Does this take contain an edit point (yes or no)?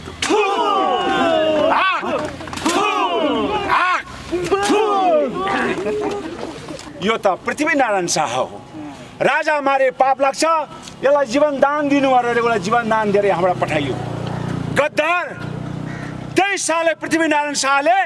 yes